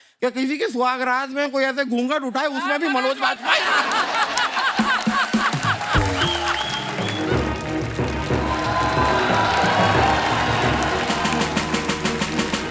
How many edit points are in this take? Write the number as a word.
one